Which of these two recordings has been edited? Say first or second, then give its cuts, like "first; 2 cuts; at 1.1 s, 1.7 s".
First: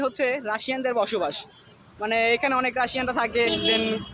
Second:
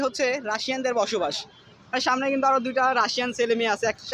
second; 1 cut; at 1.9 s